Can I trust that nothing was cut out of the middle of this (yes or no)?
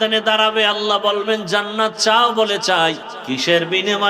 no